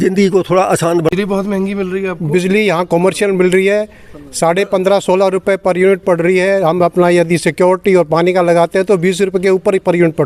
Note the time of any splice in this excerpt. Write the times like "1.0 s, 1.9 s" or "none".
1.1 s